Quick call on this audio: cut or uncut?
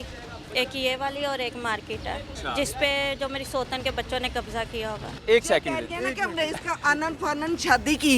cut